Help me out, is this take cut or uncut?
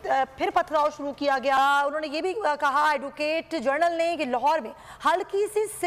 cut